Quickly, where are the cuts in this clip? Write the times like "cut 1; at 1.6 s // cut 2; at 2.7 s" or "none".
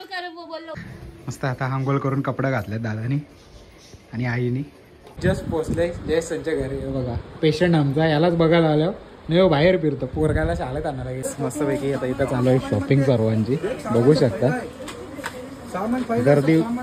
cut 1; at 0.8 s // cut 2; at 5.0 s // cut 3; at 11.2 s